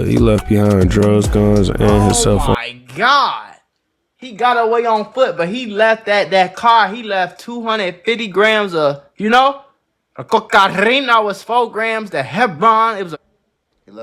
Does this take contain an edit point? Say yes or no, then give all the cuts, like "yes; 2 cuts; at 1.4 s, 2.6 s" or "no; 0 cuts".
no; 0 cuts